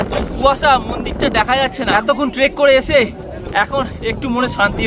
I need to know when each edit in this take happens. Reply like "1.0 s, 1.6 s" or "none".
1.9 s